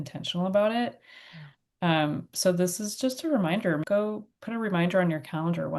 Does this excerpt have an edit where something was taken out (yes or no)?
yes